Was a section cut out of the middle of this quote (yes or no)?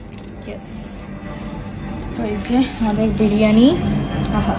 no